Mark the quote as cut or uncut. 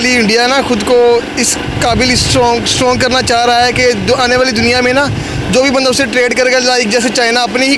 uncut